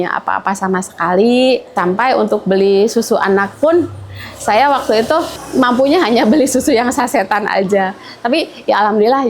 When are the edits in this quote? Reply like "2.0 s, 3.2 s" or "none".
1.8 s, 5.4 s